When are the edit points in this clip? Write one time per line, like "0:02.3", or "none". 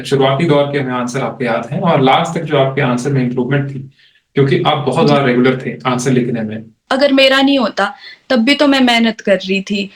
0:06.8